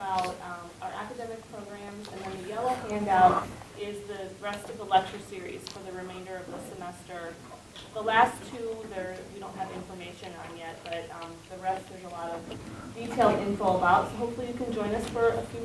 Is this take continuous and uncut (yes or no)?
no